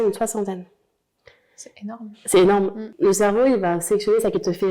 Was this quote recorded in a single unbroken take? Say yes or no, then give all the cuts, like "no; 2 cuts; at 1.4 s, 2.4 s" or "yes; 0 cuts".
no; 1 cut; at 2.8 s